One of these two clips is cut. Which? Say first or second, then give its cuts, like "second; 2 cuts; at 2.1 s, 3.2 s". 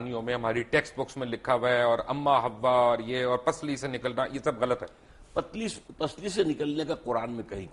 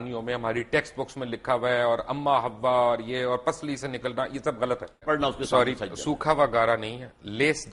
second; 1 cut; at 5.0 s